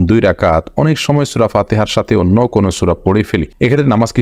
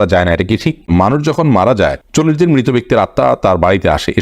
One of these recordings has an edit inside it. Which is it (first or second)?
second